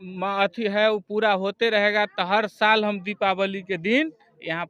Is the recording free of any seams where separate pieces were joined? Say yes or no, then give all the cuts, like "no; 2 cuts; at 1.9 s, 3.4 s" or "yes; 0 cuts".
yes; 0 cuts